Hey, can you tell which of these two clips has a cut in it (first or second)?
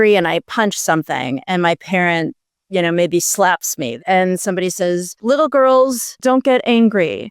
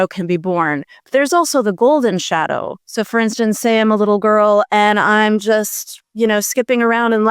first